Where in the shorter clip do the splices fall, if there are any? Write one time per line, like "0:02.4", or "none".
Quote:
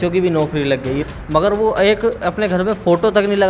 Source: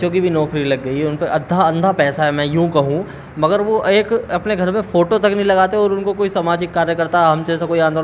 0:01.0